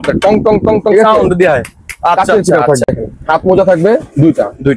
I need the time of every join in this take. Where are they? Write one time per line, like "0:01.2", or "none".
0:02.9